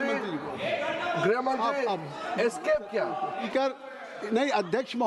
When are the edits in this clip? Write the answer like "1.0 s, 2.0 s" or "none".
3.5 s